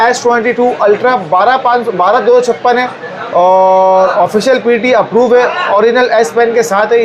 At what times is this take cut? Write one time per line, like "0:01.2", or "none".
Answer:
none